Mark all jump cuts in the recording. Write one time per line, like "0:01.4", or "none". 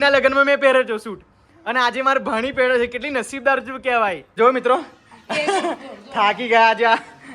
0:04.3